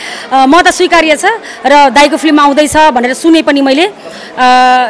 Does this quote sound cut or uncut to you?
uncut